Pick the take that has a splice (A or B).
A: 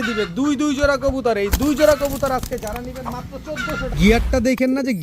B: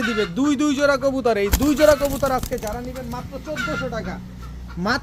A